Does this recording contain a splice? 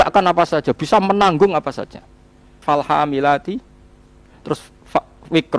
yes; 1 cut; at 2.6 s

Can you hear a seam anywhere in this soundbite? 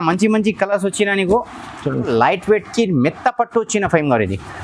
yes; 1 cut; at 2.1 s

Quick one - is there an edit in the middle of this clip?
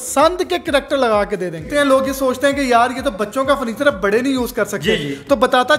yes; 1 cut; at 1.7 s

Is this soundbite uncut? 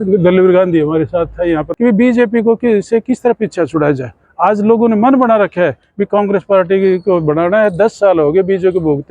no; 1 cut; at 1.7 s

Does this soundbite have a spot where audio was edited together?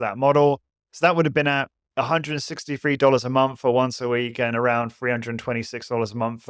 no; 0 cuts

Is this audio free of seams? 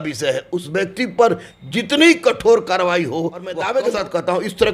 no; 1 cut; at 3.6 s

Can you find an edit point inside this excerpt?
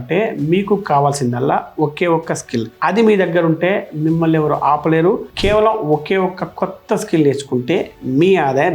yes; 1 cut; at 5.3 s

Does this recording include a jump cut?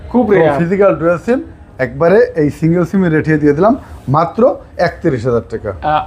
no; 0 cuts

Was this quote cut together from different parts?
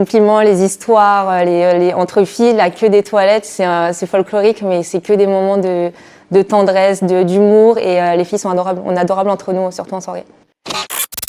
yes; 1 cut; at 10.3 s

